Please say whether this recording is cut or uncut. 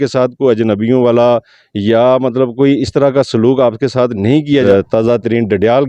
cut